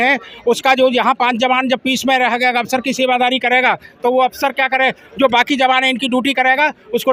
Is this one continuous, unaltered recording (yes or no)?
yes